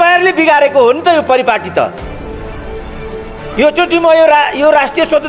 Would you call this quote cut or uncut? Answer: cut